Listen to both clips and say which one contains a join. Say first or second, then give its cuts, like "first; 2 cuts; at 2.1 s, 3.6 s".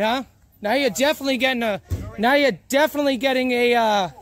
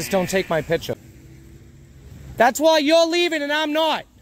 second; 1 cut; at 0.9 s